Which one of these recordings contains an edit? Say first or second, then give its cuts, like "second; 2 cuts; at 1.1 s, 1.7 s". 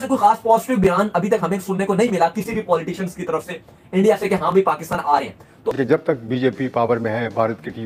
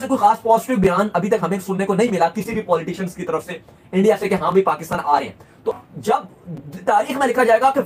first; 1 cut; at 5.7 s